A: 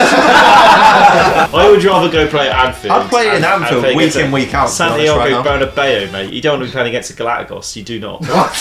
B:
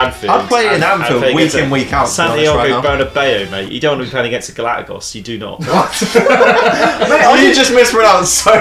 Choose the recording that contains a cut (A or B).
A